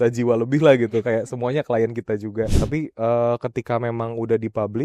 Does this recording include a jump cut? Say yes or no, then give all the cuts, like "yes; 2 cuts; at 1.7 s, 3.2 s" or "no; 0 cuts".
yes; 1 cut; at 2.5 s